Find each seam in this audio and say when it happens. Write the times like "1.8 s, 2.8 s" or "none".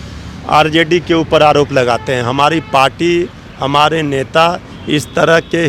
none

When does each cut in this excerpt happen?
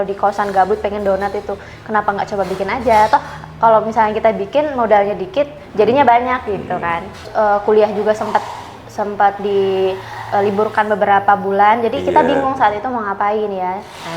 7.2 s

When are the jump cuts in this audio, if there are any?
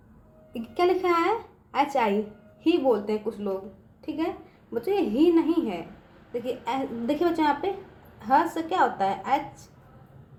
none

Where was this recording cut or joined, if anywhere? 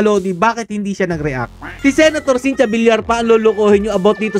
1.6 s

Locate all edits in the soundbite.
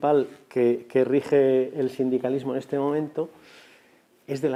none

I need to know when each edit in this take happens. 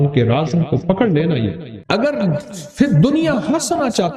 1.7 s

